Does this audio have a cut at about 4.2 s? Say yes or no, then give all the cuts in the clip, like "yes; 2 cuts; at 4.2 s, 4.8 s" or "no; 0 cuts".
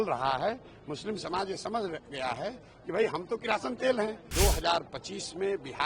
yes; 1 cut; at 4.2 s